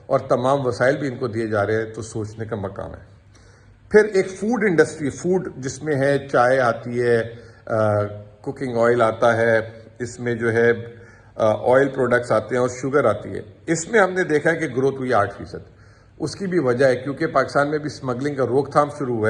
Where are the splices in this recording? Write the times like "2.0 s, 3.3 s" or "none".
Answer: none